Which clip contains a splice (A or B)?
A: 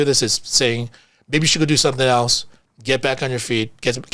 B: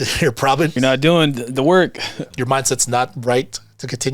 B